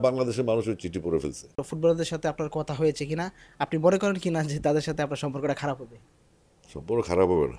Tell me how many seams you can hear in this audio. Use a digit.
1